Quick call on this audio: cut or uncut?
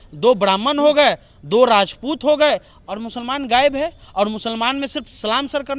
uncut